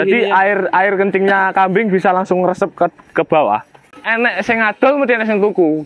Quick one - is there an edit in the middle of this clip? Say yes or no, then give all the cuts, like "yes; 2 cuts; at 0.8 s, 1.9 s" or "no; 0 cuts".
yes; 1 cut; at 3.9 s